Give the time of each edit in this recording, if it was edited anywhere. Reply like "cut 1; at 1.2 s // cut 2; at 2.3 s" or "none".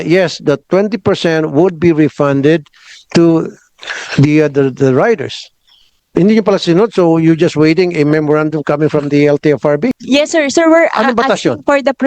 cut 1; at 9.9 s